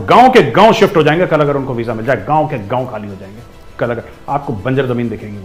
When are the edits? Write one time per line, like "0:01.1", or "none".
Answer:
none